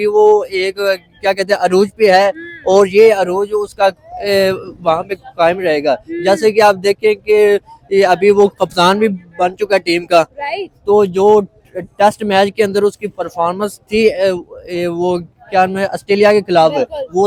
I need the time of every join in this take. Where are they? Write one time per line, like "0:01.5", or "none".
none